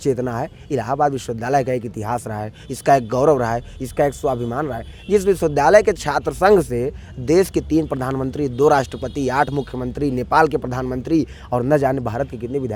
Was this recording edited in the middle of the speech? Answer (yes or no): no